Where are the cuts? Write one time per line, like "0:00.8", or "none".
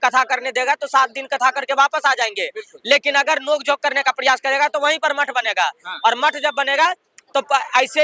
none